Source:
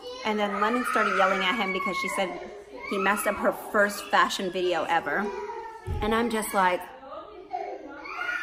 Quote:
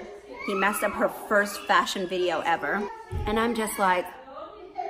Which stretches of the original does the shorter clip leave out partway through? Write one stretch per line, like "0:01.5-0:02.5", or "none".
0:05.4-0:05.8

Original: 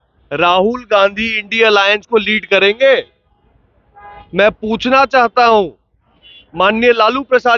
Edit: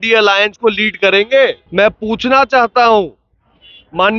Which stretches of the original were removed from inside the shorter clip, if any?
0:03.1-0:04.2

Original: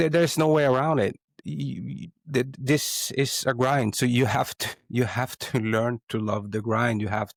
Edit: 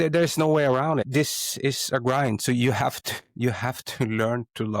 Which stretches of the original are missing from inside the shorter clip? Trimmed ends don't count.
0:01.0-0:02.6

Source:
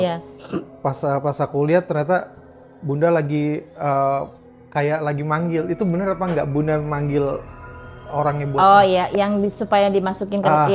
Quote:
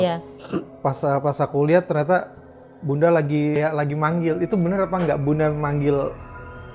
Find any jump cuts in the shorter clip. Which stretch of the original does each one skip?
0:03.6-0:04.8

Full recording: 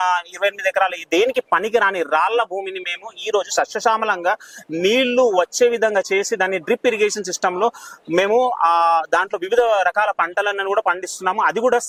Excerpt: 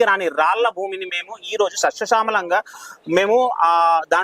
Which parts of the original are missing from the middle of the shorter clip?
0:04.6-0:07.9

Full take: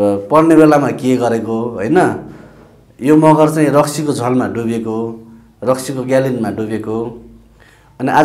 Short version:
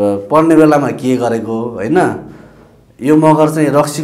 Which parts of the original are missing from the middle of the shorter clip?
none

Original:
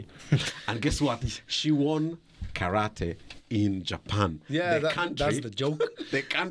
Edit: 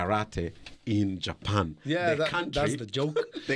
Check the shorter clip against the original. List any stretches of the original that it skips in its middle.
none

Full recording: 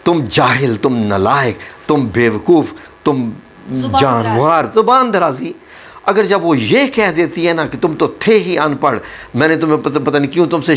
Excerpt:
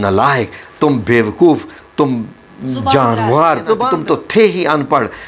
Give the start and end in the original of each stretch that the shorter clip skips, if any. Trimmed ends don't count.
0:04.9-0:07.8

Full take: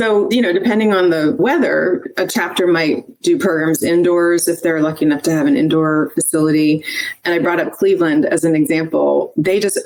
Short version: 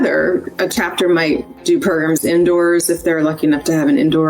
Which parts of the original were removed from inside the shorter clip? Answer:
none

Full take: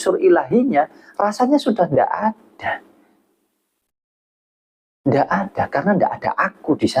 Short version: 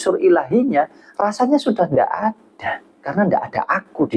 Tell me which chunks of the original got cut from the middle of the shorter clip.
0:03.1-0:05.7

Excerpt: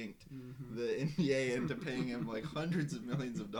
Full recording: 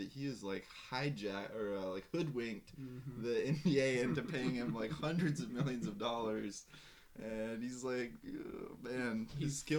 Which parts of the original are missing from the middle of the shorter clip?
none

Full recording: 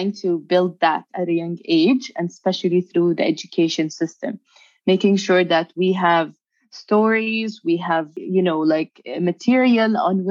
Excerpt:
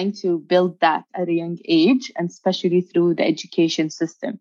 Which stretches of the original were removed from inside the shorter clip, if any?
none

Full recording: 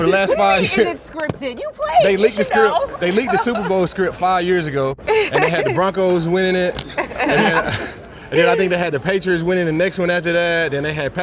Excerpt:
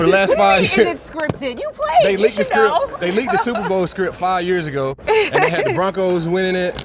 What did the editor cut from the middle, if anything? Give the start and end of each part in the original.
none

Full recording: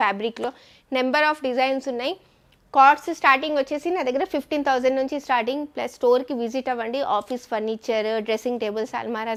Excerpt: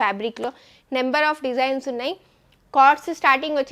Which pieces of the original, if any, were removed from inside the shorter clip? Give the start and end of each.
none

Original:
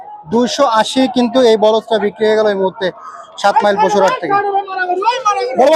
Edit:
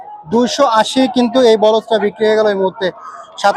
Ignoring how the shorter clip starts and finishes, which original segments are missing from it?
none

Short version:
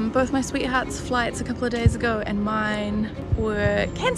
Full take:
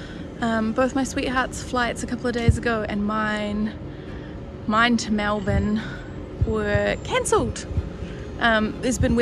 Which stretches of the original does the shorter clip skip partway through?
0:03.8-0:06.3

